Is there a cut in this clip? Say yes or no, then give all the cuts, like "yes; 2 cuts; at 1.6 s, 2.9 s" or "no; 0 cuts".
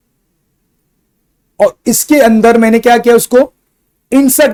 no; 0 cuts